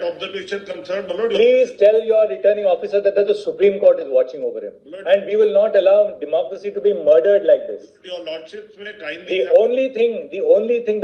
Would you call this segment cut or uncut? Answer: cut